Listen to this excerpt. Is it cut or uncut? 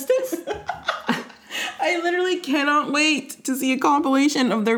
uncut